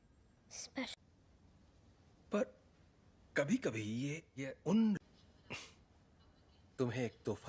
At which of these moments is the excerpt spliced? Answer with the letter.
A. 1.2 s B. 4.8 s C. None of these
C